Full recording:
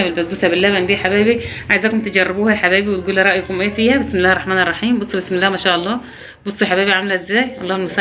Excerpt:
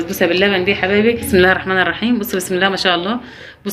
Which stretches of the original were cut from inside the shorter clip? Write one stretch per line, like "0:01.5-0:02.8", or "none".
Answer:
0:01.5-0:04.1